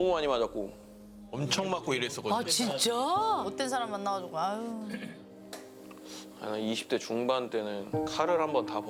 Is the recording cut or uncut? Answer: uncut